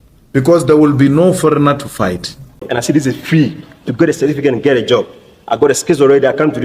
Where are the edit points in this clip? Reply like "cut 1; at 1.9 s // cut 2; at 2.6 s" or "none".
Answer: cut 1; at 2.6 s